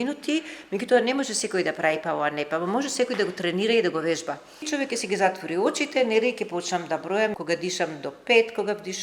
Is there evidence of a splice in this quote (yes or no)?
yes